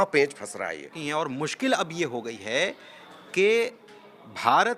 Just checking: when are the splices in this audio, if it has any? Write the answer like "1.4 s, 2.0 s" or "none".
0.9 s